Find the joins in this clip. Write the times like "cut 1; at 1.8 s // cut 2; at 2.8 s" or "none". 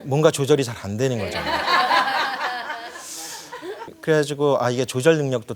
cut 1; at 4.0 s